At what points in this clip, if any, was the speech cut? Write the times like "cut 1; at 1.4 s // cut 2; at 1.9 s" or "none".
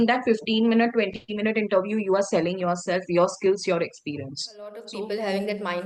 cut 1; at 4.8 s